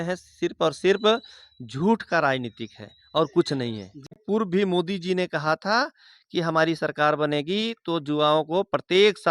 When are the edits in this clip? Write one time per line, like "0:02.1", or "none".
0:04.2